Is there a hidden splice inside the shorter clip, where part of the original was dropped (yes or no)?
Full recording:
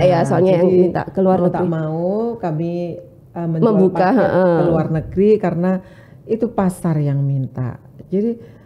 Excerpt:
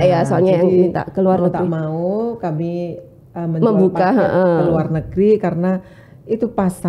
no